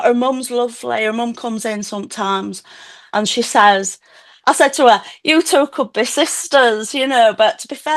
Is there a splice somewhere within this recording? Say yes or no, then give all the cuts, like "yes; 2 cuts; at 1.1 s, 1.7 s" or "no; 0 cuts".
no; 0 cuts